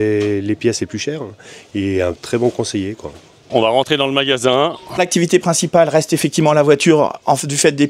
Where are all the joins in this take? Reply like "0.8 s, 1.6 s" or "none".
3.5 s, 5.0 s